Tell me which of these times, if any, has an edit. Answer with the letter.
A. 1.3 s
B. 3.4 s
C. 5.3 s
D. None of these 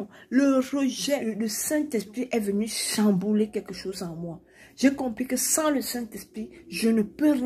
A